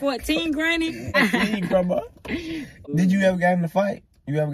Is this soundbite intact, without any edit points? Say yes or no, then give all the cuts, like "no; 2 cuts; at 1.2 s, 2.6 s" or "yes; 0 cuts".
yes; 0 cuts